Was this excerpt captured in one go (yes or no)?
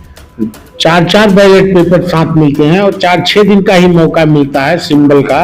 yes